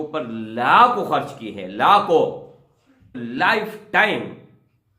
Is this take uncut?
no; 1 cut; at 3.1 s

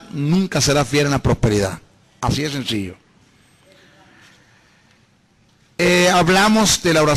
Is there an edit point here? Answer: no; 0 cuts

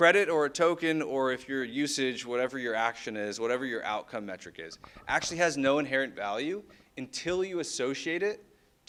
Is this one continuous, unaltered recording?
yes; 0 cuts

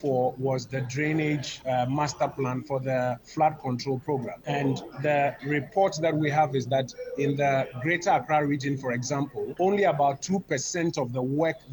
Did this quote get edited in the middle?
yes; 4 cuts; at 1.5 s, 4.3 s, 5.4 s, 9.5 s

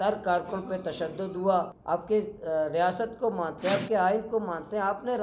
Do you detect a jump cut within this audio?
yes; 1 cut; at 1.8 s

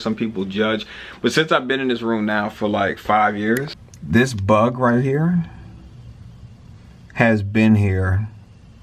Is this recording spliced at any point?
yes; 1 cut; at 3.8 s

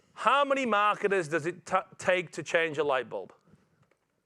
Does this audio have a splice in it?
no; 0 cuts

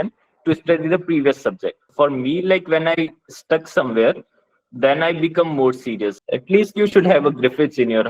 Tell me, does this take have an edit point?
yes; 2 cuts; at 1.8 s, 6.2 s

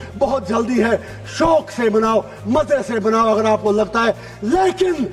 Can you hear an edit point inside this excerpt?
no; 0 cuts

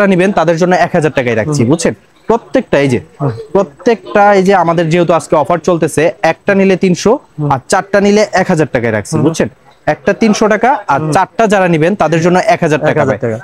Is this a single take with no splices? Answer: yes; 0 cuts

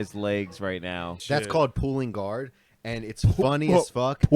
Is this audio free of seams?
no; 1 cut; at 1.2 s

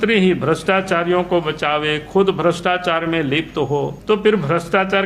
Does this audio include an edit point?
yes; 1 cut; at 3.9 s

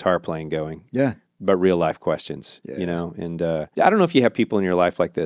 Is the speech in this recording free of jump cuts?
no; 1 cut; at 3.7 s

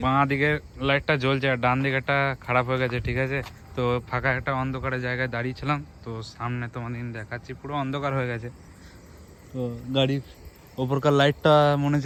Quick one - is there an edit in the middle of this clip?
no; 0 cuts

